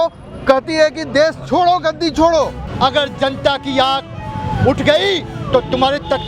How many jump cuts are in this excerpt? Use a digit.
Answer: 1